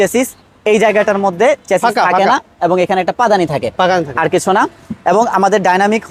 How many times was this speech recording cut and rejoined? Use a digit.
0